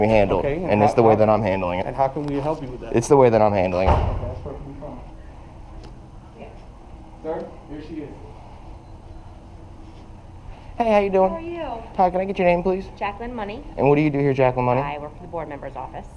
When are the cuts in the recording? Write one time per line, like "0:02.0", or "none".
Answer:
none